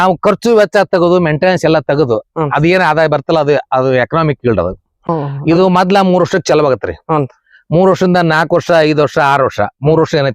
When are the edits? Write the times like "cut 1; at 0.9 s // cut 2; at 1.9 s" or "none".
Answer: cut 1; at 5.1 s